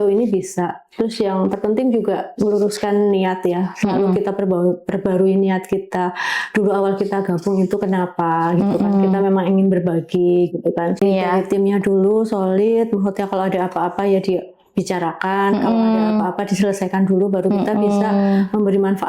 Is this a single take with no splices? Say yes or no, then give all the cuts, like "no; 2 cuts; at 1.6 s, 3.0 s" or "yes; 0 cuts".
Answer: no; 1 cut; at 11.0 s